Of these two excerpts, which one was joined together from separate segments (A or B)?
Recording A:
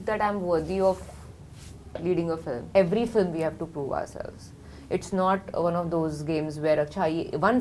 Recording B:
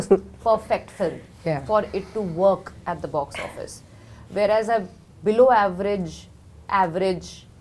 A